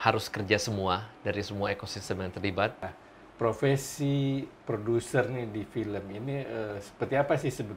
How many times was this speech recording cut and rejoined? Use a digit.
1